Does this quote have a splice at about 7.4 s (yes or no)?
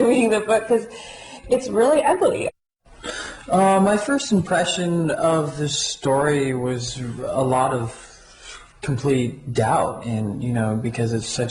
yes